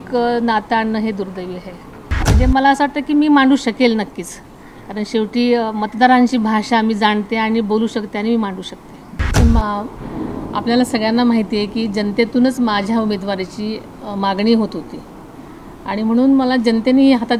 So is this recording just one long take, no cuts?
no; 2 cuts; at 2.3 s, 9.4 s

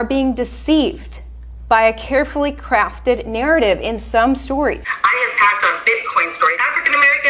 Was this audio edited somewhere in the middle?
yes; 2 cuts; at 4.9 s, 6.6 s

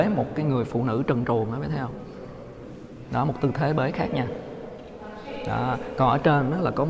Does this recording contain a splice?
no; 0 cuts

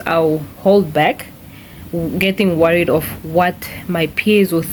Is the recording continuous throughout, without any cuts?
yes; 0 cuts

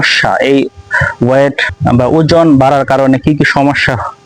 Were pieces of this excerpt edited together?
yes; 1 cut; at 1.7 s

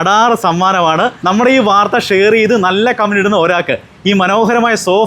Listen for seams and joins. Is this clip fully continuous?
no; 1 cut; at 1.2 s

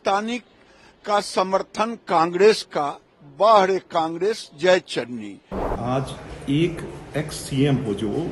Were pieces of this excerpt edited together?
yes; 1 cut; at 5.8 s

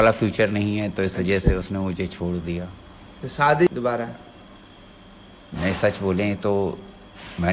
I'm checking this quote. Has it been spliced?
yes; 1 cut; at 3.7 s

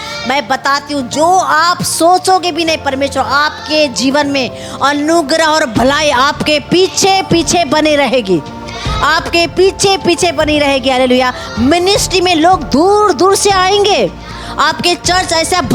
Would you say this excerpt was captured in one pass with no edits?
yes; 0 cuts

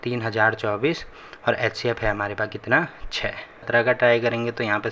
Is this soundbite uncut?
no; 1 cut; at 3.7 s

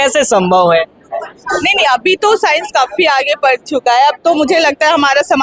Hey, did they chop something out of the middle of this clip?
no; 0 cuts

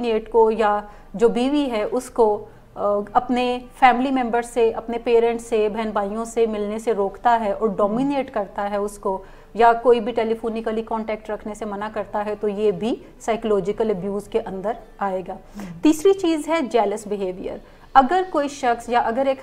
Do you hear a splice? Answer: no; 0 cuts

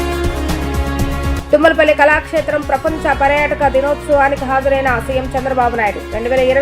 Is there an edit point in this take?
yes; 1 cut; at 1.3 s

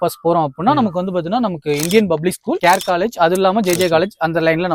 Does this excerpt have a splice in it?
no; 0 cuts

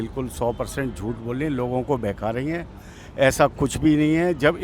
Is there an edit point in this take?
no; 0 cuts

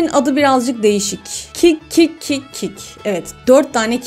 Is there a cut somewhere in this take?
no; 0 cuts

